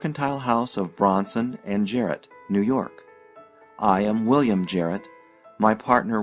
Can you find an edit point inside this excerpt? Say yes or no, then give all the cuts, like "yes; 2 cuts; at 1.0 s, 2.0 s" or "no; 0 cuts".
yes; 1 cut; at 4.3 s